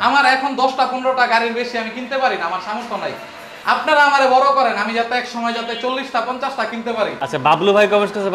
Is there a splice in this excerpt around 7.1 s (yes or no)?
no